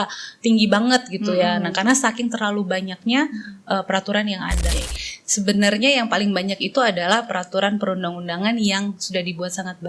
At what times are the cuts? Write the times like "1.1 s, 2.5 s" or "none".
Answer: 4.6 s